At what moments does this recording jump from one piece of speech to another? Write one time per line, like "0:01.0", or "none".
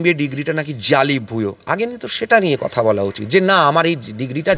none